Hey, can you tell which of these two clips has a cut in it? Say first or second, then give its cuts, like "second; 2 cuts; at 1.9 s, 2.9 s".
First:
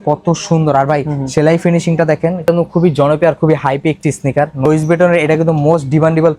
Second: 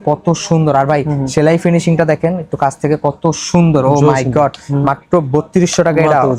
first; 2 cuts; at 2.5 s, 4.6 s